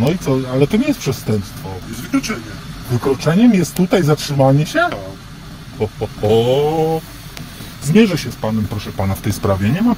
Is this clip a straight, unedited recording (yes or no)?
yes